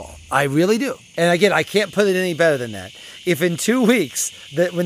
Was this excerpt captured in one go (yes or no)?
no